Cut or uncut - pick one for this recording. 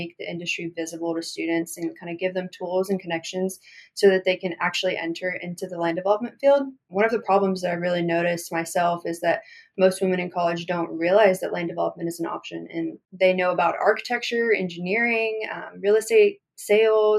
cut